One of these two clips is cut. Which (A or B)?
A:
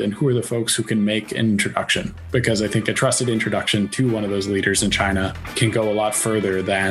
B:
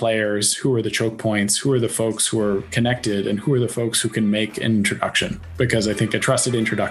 A